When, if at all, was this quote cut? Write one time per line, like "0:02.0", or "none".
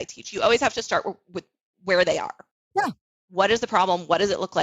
0:02.5